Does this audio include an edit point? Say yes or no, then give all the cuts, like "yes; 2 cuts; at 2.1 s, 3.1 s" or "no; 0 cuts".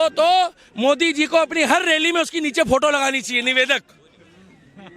no; 0 cuts